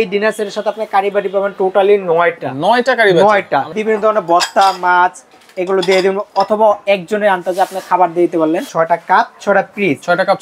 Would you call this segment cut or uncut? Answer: cut